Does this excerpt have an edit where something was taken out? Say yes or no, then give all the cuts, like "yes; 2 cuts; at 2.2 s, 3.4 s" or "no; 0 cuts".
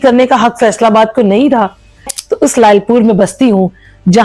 yes; 1 cut; at 2.2 s